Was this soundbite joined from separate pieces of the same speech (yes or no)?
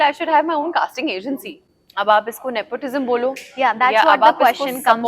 yes